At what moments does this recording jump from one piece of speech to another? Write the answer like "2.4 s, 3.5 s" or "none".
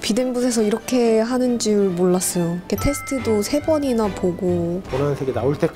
4.8 s